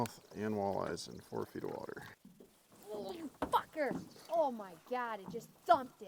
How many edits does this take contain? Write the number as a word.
one